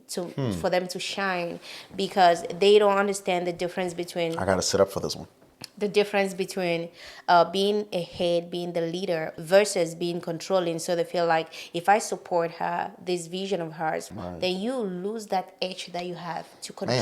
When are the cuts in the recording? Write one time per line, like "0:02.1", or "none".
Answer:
0:14.1